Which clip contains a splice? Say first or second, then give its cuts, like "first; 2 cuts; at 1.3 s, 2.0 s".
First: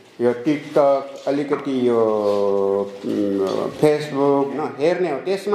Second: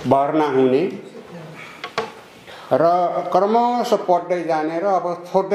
first; 1 cut; at 4.5 s